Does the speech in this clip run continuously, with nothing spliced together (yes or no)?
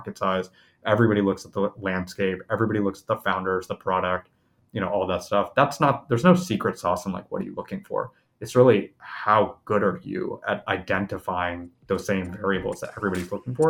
yes